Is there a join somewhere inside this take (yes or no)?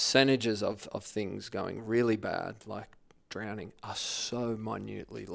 no